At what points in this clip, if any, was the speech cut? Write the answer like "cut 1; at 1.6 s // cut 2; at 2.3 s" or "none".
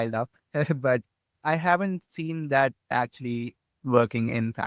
cut 1; at 2.9 s